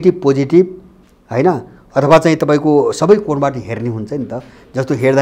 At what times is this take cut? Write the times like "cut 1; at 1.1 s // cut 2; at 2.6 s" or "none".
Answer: none